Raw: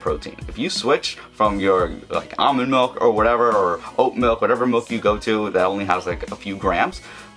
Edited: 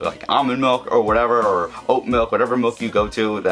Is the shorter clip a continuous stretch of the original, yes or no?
yes